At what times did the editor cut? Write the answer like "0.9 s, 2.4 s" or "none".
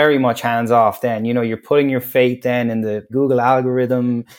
3.1 s

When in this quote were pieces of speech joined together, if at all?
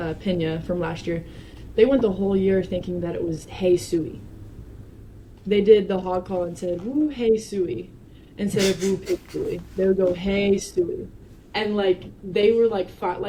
none

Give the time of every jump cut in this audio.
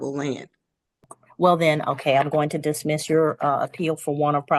1.2 s

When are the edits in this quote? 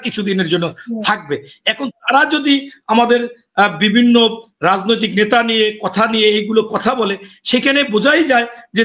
none

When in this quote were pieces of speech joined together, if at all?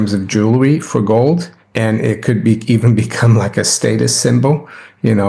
1.6 s

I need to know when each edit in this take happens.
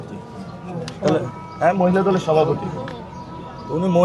none

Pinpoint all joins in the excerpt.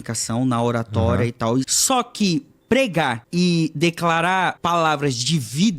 1.8 s, 3.2 s, 4.6 s

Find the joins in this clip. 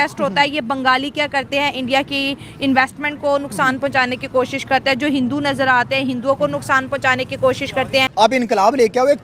8.3 s

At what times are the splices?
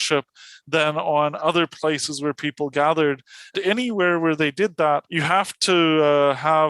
3.4 s, 5.1 s

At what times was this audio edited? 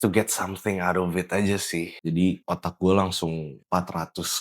1.9 s

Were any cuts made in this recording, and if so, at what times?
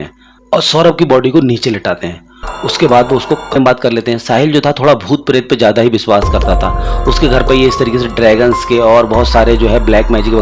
3.5 s

